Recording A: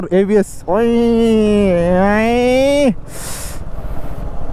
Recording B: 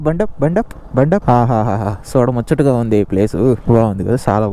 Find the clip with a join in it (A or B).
B